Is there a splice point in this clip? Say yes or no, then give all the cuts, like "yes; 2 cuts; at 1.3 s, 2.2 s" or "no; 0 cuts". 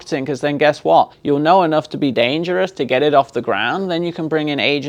yes; 1 cut; at 1.2 s